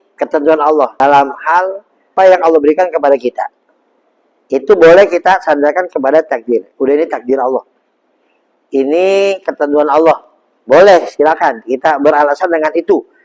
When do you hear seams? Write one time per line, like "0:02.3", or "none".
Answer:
0:01.0
0:02.1